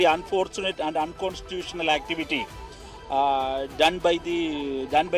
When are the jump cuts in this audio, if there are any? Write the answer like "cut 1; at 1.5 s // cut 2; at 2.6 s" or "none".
none